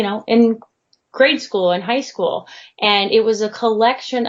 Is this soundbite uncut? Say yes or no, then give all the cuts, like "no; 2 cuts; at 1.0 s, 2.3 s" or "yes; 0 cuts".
yes; 0 cuts